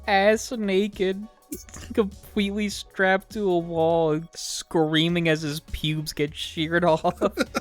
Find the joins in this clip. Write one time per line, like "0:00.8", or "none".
none

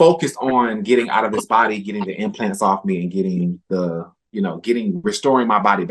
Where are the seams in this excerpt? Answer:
none

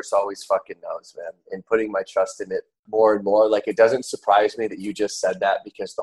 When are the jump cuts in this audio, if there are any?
0:02.8

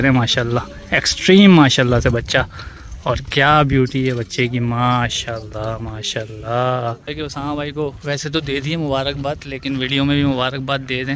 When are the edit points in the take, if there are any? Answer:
0:07.1

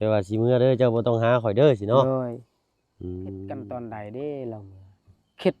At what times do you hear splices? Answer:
0:03.6

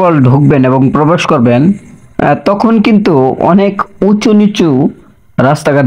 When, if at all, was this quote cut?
none

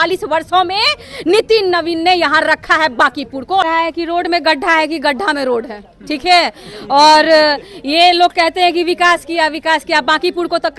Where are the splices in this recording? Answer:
0:03.6

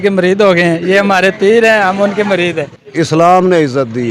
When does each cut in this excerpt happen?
0:02.8

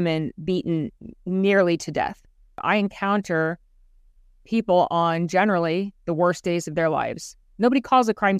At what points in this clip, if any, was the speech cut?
0:02.5

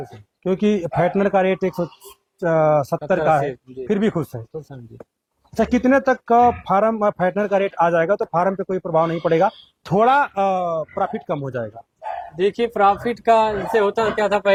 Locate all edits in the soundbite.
none

